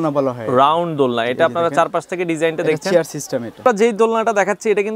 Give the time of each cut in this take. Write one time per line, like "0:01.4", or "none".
0:03.6